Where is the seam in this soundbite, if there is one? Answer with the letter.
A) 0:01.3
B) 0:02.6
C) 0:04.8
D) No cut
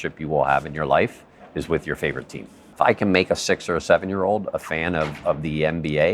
B